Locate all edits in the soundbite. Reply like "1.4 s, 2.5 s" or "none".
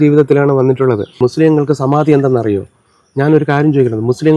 1.1 s